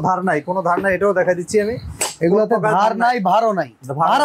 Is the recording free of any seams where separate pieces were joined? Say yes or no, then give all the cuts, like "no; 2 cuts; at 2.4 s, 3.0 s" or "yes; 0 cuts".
yes; 0 cuts